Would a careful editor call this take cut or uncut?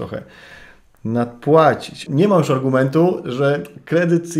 cut